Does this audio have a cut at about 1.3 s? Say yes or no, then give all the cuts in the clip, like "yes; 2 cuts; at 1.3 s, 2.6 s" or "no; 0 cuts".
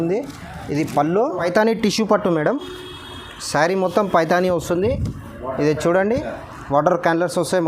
yes; 1 cut; at 1.3 s